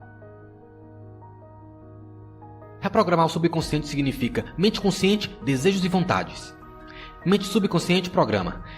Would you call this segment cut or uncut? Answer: cut